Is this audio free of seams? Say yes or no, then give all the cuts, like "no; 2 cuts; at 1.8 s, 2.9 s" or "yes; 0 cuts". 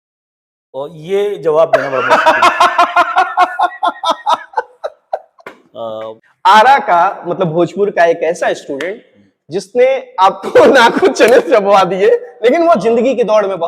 no; 1 cut; at 6.3 s